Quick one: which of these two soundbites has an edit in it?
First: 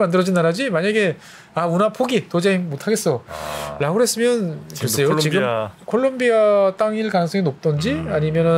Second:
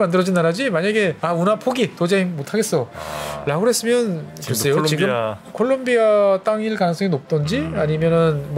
second; 1 cut; at 1.2 s

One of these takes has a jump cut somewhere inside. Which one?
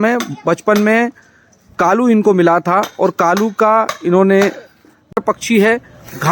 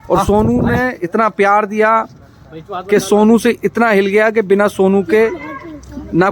first; 1 cut; at 5.2 s

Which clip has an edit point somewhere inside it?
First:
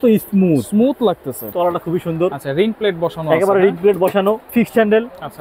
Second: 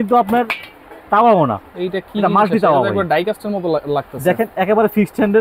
first; 2 cuts; at 1.4 s, 4.5 s

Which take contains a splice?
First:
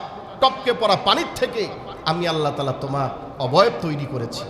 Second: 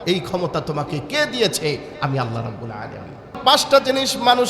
second; 1 cut; at 3.4 s

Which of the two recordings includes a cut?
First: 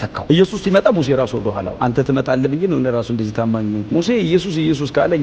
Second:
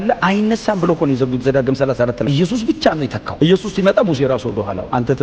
second; 1 cut; at 2.2 s

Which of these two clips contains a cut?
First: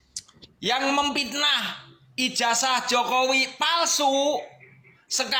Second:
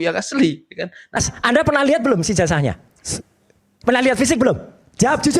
second; 1 cut; at 1.2 s

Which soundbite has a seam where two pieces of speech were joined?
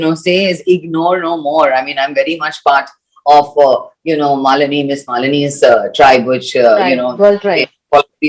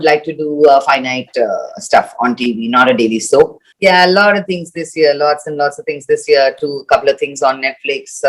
second; 1 cut; at 3.6 s

